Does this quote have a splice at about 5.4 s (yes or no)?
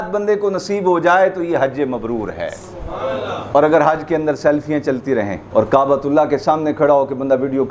yes